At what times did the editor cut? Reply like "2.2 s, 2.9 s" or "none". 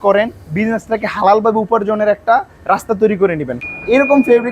3.5 s